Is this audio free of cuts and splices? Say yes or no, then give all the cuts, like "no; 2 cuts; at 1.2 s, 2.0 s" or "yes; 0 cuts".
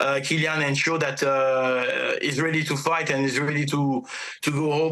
yes; 0 cuts